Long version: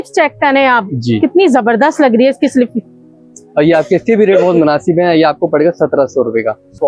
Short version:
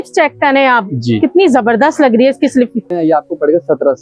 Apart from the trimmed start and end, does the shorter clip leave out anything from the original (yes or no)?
yes